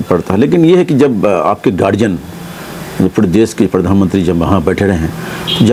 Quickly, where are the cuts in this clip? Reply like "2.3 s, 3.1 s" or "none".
none